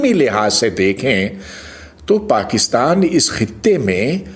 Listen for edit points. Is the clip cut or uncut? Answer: uncut